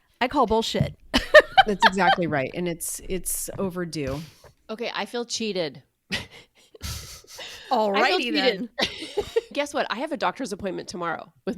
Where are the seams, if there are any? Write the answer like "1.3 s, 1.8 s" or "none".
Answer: 4.6 s, 9.5 s

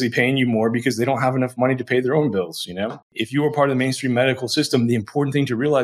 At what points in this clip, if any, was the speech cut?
3.1 s

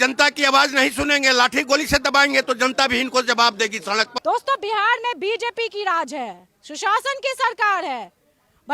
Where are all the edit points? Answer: 4.1 s

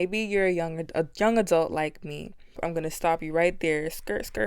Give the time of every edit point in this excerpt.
2.6 s

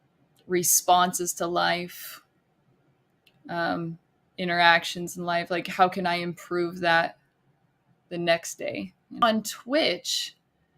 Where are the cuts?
9.2 s

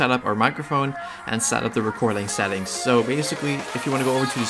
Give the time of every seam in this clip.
none

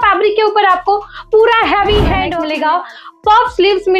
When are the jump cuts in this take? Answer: 2.3 s

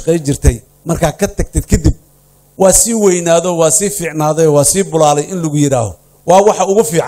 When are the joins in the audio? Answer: none

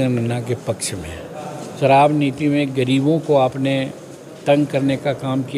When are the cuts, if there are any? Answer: 1.6 s

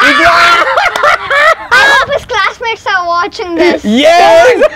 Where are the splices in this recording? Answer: none

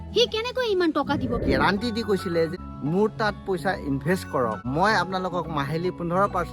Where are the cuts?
1.4 s, 2.5 s, 4.6 s

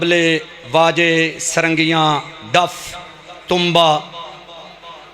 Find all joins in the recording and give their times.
none

